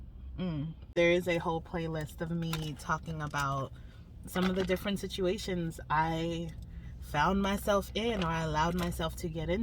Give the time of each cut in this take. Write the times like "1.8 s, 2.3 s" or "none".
0.9 s